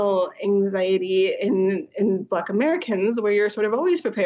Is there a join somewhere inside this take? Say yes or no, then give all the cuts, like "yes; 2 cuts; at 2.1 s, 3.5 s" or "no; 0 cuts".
no; 0 cuts